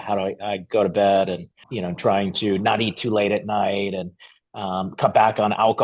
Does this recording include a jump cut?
yes; 1 cut; at 1.7 s

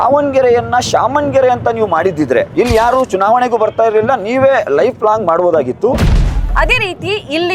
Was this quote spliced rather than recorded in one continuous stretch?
yes; 2 cuts; at 2.5 s, 6.1 s

